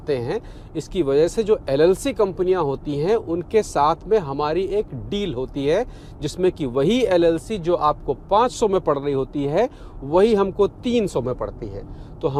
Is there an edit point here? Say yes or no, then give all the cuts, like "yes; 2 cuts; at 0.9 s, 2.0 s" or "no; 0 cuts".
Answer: no; 0 cuts